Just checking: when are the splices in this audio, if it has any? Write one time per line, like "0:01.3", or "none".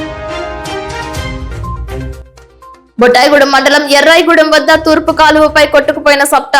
0:02.8